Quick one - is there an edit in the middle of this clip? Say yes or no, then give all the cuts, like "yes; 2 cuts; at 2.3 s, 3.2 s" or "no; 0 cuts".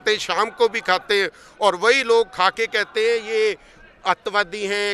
no; 0 cuts